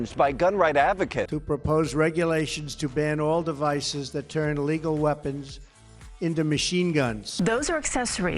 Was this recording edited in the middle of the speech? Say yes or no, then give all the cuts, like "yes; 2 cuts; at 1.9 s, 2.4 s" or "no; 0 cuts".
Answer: yes; 2 cuts; at 1.2 s, 7.2 s